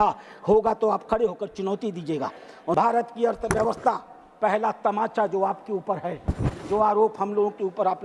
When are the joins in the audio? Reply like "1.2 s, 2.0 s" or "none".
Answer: 2.7 s